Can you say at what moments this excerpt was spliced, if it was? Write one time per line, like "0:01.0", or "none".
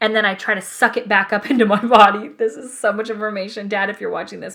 none